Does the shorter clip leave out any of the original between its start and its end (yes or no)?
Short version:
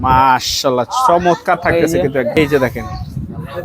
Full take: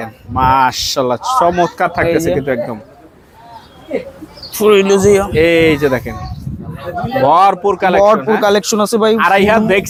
yes